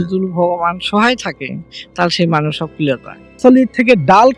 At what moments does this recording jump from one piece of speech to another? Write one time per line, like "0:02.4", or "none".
0:03.4